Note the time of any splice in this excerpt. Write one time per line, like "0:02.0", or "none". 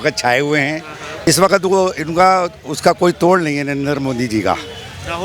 0:01.3